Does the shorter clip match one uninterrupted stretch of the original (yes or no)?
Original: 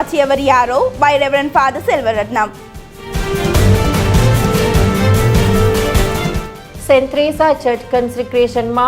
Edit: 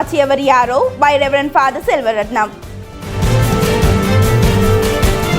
no